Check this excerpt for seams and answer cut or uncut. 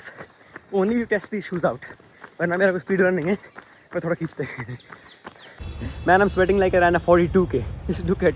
uncut